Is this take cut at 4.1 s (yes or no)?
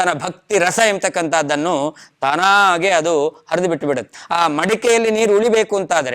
yes